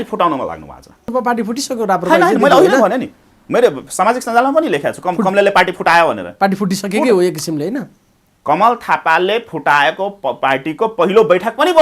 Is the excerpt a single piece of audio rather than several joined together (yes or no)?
no